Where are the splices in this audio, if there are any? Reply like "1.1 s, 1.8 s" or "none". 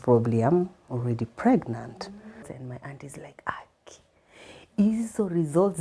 2.3 s